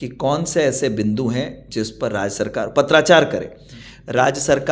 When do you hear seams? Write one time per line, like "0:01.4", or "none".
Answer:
none